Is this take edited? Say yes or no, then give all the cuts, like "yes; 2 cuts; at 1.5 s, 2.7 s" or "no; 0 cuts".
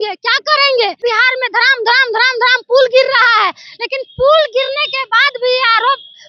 yes; 1 cut; at 1.0 s